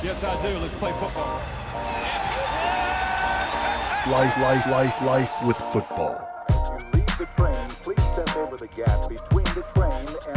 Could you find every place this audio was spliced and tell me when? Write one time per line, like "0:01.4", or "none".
none